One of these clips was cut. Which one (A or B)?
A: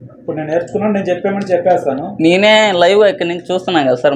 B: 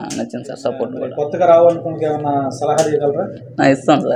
B